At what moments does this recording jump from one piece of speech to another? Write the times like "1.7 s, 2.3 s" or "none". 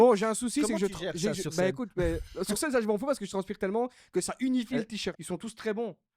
5.1 s